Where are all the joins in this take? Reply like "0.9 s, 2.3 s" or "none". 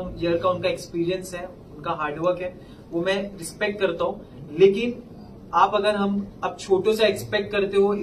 none